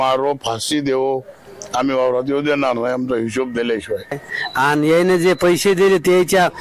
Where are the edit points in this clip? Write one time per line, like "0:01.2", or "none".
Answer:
0:04.5